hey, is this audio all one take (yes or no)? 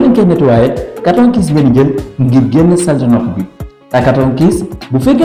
yes